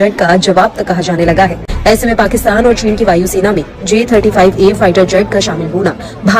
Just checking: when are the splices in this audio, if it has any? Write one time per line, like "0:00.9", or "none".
0:01.7